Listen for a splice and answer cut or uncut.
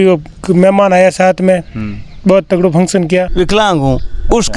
cut